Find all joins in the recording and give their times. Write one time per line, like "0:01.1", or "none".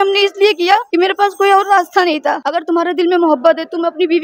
0:02.4